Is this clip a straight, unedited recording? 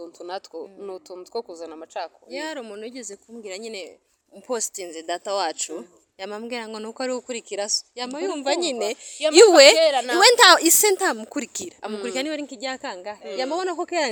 yes; 0 cuts

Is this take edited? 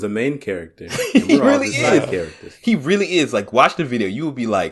no; 0 cuts

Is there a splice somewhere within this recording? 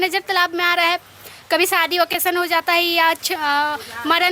no; 0 cuts

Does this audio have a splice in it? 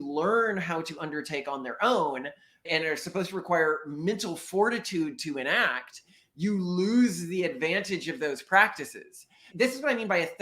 yes; 2 cuts; at 2.6 s, 9.5 s

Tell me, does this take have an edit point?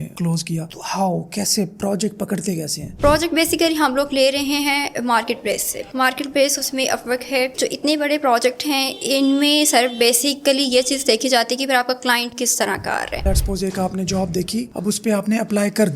yes; 3 cuts; at 2.8 s, 7.5 s, 13.2 s

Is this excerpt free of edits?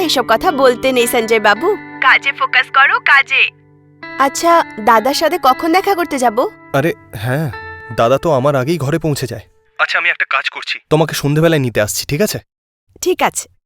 yes; 0 cuts

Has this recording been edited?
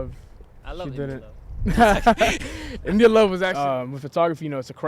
yes; 1 cut; at 3.5 s

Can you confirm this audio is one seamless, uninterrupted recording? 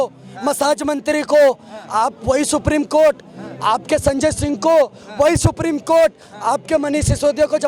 yes; 0 cuts

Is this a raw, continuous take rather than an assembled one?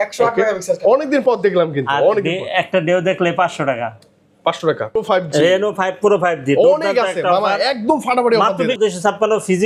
no; 2 cuts; at 5.0 s, 8.8 s

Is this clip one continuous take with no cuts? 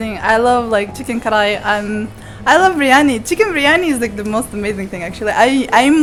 yes; 0 cuts

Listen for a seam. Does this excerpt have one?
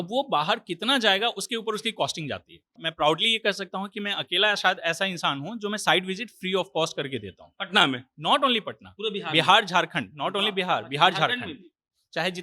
yes; 1 cut; at 2.8 s

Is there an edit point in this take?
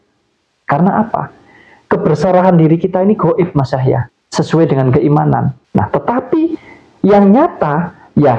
yes; 1 cut; at 5.6 s

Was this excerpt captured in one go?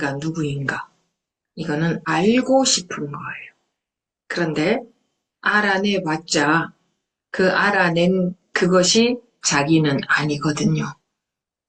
no; 1 cut; at 2.0 s

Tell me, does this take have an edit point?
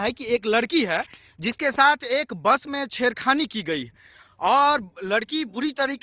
yes; 1 cut; at 2.9 s

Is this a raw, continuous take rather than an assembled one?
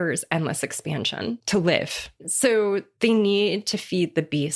no; 2 cuts; at 1.4 s, 2.2 s

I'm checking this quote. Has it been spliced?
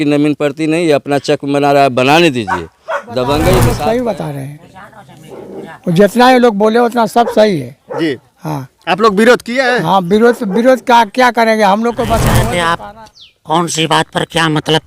yes; 2 cuts; at 3.6 s, 12.4 s

